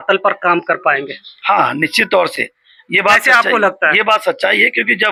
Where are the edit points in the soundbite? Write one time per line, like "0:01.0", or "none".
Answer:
none